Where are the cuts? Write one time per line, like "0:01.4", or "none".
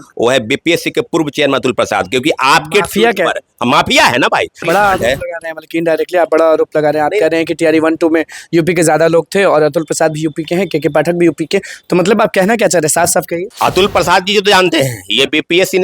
0:04.6
0:13.5